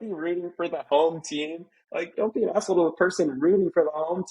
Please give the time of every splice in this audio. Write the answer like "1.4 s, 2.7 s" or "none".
2.1 s